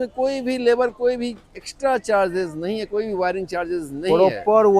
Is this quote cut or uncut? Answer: uncut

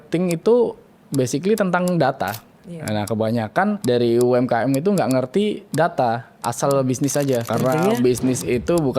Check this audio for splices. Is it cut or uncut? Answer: cut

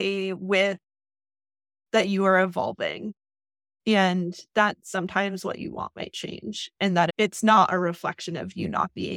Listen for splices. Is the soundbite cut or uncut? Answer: uncut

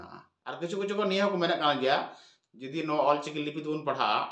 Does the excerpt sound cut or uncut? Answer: uncut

